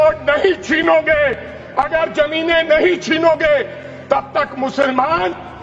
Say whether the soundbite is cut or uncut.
uncut